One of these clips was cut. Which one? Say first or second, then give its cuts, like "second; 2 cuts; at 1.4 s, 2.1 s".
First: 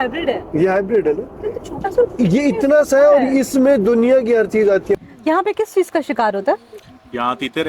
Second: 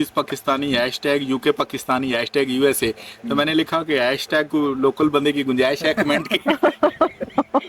first; 1 cut; at 5.0 s